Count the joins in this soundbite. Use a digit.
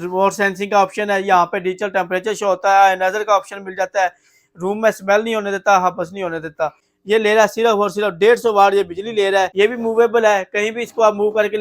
2